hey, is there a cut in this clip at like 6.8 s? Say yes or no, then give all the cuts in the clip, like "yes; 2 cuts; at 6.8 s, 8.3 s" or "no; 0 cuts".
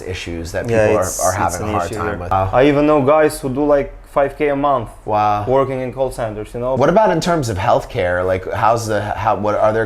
yes; 2 cuts; at 2.3 s, 6.8 s